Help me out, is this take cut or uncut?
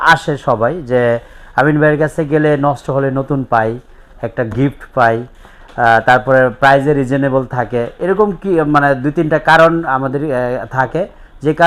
uncut